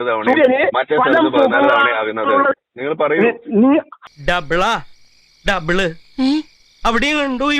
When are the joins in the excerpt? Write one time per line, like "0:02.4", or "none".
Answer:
0:04.0